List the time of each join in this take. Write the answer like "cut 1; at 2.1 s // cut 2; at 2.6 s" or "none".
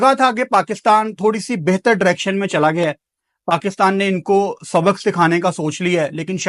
none